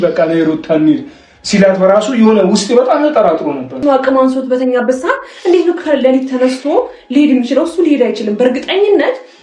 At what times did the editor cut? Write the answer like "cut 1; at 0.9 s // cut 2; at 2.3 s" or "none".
cut 1; at 3.8 s